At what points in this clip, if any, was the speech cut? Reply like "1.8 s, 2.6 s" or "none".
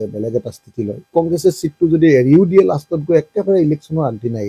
1.1 s

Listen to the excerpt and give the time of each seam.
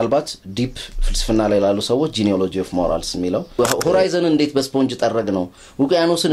3.5 s

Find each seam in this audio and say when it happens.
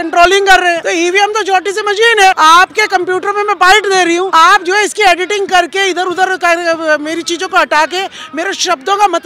0.8 s, 2.4 s, 4.3 s

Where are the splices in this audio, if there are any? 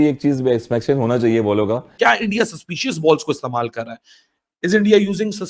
1.9 s

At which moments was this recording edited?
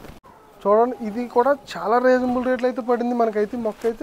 none

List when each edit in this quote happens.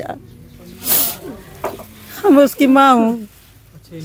none

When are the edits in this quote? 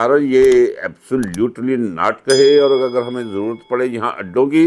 none

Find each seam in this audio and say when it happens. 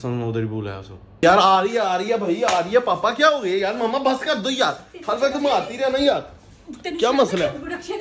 1.2 s

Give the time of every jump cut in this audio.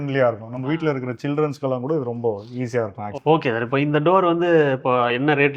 none

